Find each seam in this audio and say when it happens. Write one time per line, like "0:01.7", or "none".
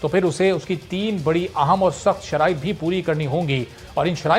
none